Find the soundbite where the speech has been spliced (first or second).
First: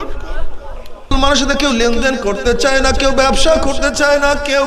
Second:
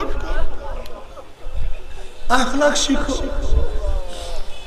first